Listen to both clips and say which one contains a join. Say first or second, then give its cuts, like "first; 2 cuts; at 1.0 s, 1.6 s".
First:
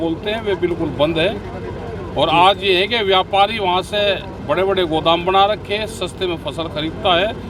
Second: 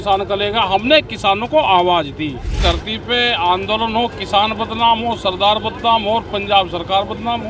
second; 1 cut; at 2.5 s